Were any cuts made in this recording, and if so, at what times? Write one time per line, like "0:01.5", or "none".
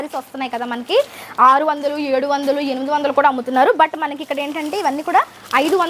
none